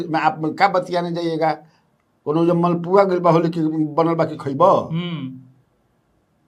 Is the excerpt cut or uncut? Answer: uncut